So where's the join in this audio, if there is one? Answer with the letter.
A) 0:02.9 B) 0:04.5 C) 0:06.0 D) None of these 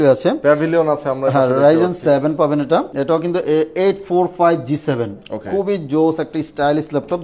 A